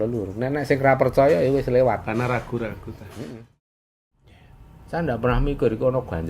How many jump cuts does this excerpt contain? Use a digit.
1